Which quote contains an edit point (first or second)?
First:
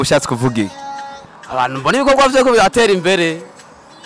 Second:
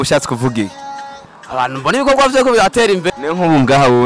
second